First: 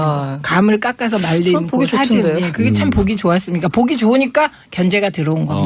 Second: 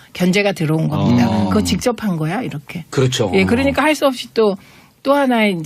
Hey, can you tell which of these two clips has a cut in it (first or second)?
second